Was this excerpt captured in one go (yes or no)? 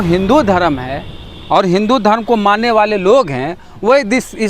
yes